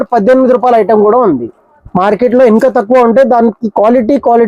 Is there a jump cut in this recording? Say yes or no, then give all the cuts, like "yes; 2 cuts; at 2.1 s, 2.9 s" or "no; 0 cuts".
no; 0 cuts